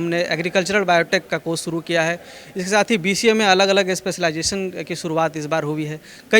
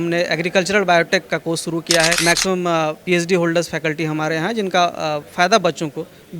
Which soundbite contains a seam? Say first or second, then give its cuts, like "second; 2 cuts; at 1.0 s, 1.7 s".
second; 1 cut; at 2.2 s